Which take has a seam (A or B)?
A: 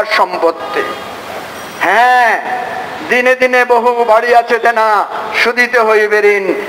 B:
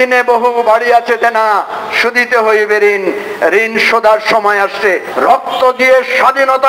B